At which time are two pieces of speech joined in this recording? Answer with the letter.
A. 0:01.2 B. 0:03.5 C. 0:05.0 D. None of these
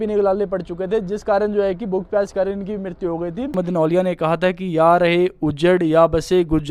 B